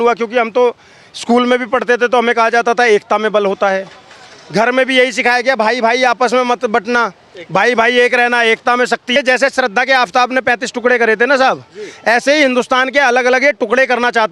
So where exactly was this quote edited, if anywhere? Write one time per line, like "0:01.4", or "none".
0:09.1